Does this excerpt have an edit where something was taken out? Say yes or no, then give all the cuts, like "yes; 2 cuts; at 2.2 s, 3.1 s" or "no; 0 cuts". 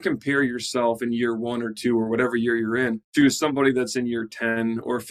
yes; 1 cut; at 3.5 s